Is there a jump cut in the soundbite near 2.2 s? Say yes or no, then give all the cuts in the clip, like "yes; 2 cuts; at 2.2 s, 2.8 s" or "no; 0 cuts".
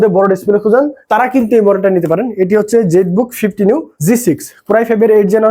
no; 2 cuts; at 1.0 s, 3.9 s